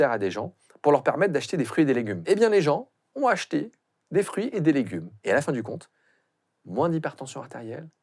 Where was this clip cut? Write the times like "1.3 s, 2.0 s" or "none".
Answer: 2.2 s, 5.1 s